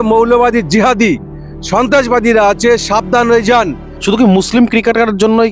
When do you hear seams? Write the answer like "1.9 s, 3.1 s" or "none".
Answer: 3.9 s